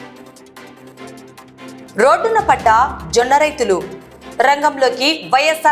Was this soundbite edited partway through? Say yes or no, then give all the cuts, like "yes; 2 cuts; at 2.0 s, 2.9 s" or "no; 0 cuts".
yes; 1 cut; at 1.3 s